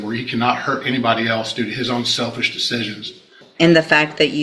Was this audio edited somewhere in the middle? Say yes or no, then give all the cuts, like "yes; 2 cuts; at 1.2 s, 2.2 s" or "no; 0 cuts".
yes; 1 cut; at 3.4 s